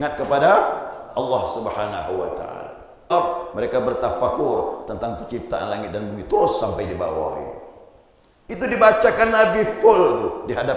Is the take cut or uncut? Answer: cut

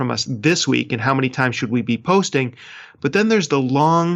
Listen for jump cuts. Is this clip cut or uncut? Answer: uncut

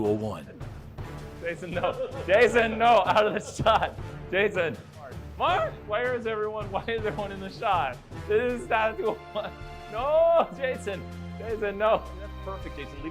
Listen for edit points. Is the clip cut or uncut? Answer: uncut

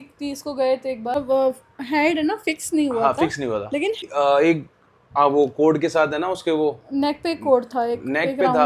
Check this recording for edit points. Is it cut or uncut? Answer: cut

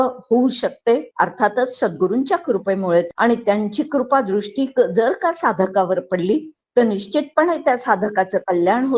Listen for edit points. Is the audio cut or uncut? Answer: cut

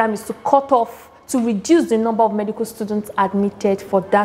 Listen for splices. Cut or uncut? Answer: uncut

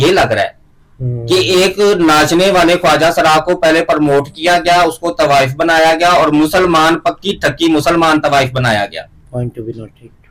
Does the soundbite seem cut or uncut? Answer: uncut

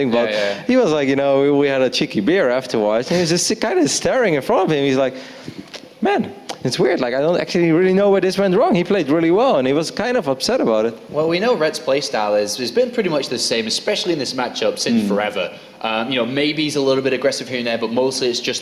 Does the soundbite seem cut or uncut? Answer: cut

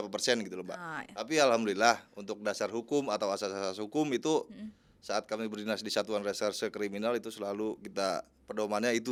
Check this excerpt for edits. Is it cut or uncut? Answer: uncut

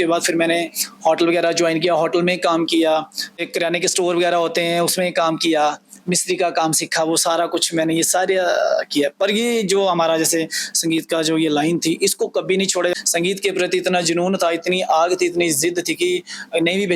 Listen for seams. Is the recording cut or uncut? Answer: cut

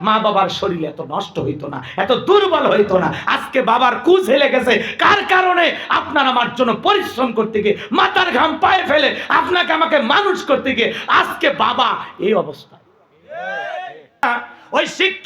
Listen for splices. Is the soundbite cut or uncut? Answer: cut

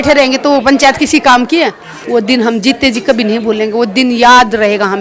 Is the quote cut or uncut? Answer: cut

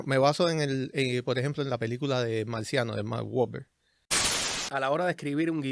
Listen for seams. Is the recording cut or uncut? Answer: cut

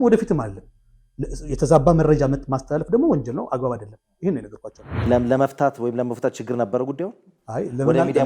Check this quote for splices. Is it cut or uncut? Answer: cut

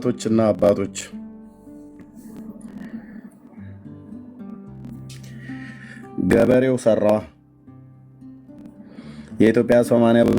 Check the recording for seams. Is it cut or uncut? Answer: cut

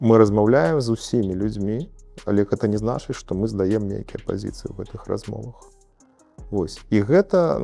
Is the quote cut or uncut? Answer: uncut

